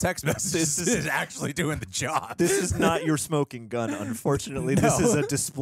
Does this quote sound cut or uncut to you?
uncut